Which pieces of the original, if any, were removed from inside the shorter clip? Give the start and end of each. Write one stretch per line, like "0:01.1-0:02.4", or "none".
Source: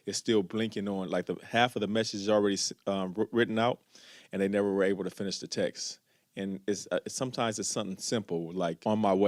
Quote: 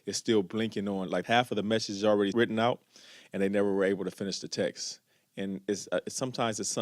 0:01.2-0:01.5
0:02.6-0:03.3